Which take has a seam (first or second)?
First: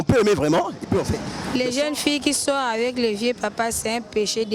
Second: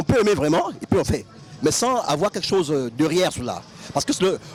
first